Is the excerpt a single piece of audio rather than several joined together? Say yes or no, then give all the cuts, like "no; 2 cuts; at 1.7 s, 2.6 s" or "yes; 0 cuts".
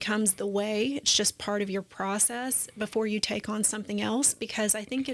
yes; 0 cuts